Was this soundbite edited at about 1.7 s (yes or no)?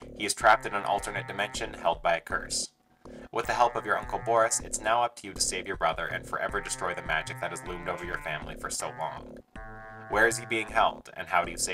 yes